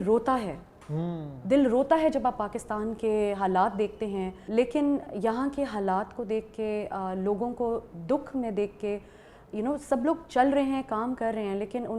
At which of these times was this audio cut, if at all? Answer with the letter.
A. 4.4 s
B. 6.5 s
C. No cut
A